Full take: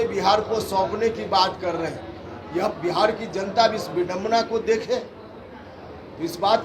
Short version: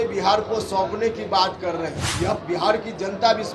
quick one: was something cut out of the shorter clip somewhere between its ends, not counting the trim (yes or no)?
yes